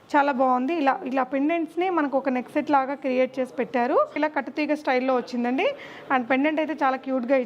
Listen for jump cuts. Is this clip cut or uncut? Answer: cut